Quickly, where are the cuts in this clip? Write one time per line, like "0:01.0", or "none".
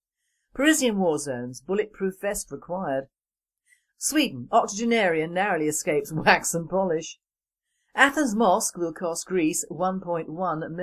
0:06.6